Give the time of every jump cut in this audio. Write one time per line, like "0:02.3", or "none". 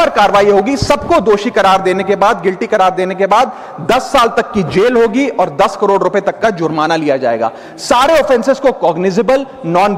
none